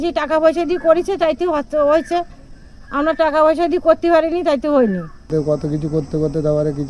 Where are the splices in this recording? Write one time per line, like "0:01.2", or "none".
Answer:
0:05.3